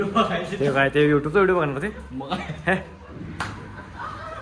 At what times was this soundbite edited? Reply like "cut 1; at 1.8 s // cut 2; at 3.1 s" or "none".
none